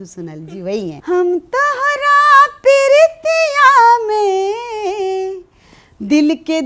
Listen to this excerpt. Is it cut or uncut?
cut